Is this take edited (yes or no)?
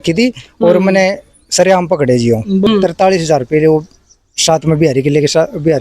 yes